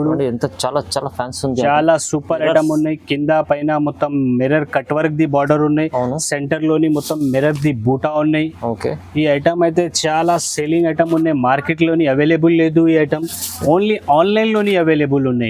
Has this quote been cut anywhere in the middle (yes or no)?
no